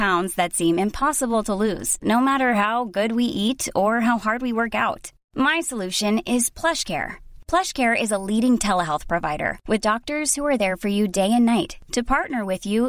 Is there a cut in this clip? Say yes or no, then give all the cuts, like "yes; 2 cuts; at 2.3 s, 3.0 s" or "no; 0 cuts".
no; 0 cuts